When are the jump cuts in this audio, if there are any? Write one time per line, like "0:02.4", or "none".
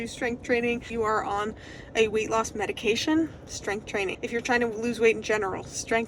0:00.9
0:04.2